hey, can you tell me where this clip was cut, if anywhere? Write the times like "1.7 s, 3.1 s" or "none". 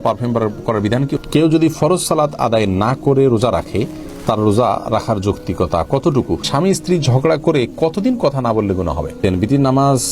1.2 s, 6.5 s, 9.2 s